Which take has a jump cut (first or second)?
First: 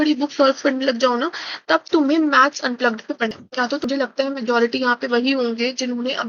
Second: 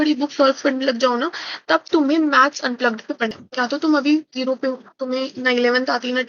first